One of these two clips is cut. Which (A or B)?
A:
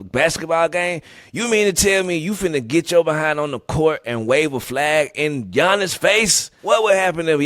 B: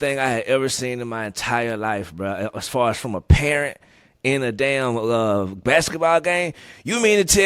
A